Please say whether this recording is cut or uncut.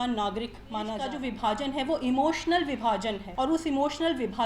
cut